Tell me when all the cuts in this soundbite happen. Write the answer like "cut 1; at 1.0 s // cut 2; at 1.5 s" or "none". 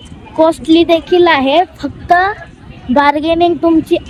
none